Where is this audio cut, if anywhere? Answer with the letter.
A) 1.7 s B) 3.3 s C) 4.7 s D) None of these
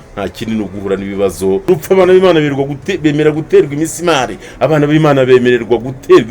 A